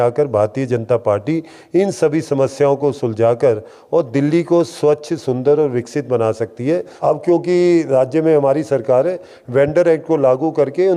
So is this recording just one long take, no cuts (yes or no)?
no